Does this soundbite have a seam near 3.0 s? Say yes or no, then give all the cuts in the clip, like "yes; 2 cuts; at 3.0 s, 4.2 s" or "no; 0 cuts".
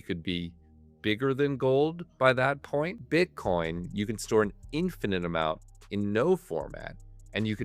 yes; 1 cut; at 3.0 s